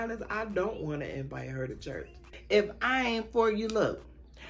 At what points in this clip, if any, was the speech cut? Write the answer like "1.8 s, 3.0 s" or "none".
2.3 s